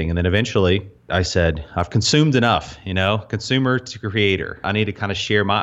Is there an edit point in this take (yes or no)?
yes